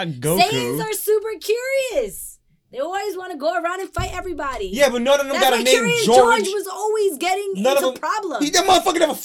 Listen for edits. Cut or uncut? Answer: uncut